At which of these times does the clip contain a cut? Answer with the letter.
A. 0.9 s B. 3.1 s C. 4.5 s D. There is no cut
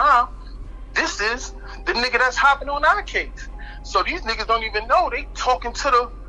D